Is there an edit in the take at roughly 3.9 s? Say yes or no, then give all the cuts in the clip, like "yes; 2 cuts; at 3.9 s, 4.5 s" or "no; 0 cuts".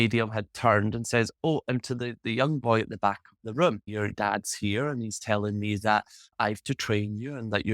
yes; 1 cut; at 3.9 s